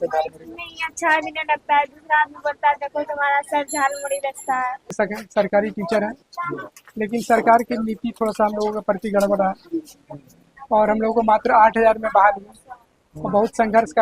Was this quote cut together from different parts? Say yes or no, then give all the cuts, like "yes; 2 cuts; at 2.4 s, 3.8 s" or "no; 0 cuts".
yes; 1 cut; at 4.9 s